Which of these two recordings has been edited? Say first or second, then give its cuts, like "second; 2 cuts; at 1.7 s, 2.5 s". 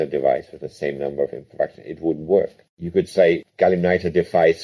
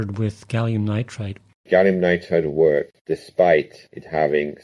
second; 2 cuts; at 1.6 s, 3.0 s